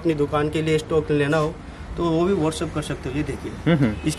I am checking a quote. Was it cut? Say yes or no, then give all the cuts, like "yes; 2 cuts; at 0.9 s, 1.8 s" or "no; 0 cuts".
no; 0 cuts